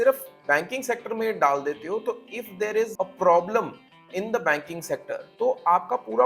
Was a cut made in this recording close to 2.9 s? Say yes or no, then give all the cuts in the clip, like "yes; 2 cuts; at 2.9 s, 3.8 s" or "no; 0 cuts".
yes; 2 cuts; at 2.9 s, 5.2 s